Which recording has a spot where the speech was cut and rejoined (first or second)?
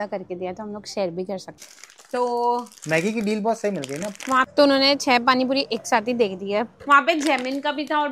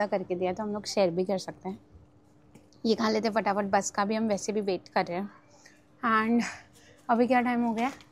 first